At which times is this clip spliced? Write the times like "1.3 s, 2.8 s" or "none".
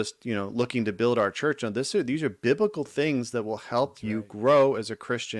none